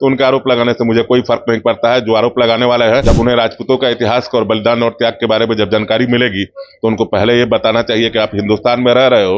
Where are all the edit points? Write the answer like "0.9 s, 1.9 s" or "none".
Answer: 3.0 s